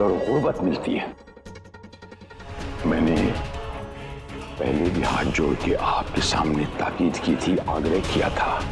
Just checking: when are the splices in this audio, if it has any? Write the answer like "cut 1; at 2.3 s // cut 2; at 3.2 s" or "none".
cut 1; at 2.6 s